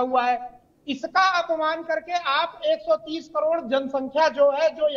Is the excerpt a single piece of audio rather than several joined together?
yes; 0 cuts

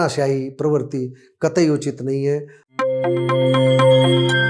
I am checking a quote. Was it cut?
yes; 1 cut; at 2.6 s

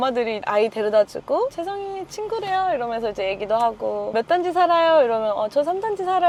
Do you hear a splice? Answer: no; 0 cuts

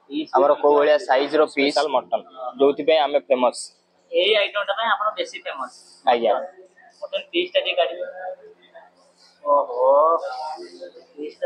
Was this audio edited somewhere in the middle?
yes; 1 cut; at 1.7 s

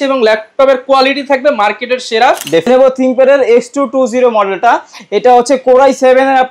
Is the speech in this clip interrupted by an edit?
yes; 1 cut; at 2.7 s

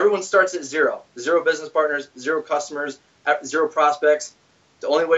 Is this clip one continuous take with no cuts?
yes; 0 cuts

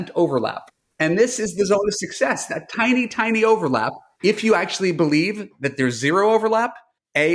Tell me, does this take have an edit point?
no; 0 cuts

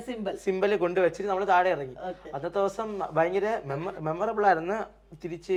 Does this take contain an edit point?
no; 0 cuts

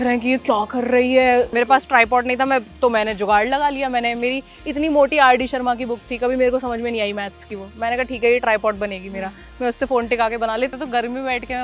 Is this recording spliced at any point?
yes; 2 cuts; at 1.5 s, 10.7 s

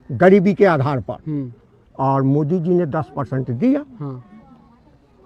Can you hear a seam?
no; 0 cuts

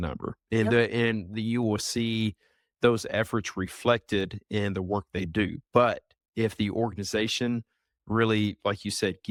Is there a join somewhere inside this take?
no; 0 cuts

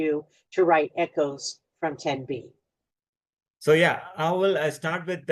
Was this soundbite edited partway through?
no; 0 cuts

